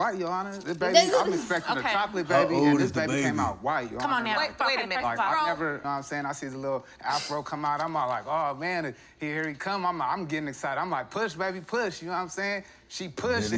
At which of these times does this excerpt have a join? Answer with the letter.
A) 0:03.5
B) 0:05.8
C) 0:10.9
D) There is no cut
B